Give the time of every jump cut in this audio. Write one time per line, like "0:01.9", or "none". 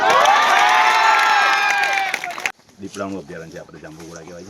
0:02.5